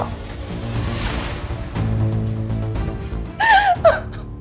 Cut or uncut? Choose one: uncut